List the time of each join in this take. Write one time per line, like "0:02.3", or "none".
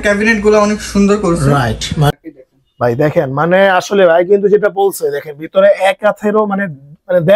0:02.1